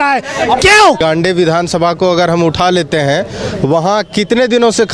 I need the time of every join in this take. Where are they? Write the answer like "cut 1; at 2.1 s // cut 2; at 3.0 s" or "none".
cut 1; at 1.0 s